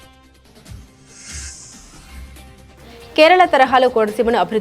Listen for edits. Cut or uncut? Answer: cut